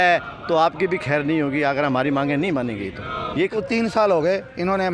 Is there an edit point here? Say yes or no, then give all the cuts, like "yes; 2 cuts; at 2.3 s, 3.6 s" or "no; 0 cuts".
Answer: yes; 1 cut; at 3.5 s